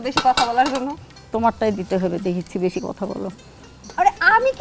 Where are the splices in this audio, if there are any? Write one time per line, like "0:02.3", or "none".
none